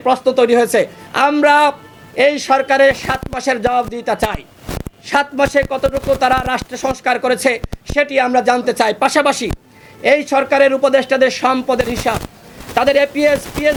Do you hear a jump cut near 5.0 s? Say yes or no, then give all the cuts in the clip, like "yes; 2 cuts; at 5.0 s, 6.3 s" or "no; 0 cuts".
no; 0 cuts